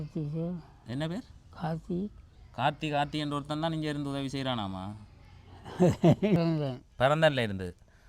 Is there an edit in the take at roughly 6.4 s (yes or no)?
yes